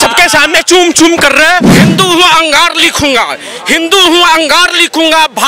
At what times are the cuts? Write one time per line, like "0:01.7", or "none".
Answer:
0:01.7